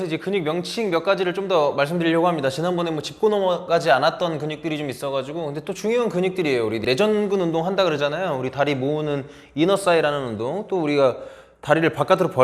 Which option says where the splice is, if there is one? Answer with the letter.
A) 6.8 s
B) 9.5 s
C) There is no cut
A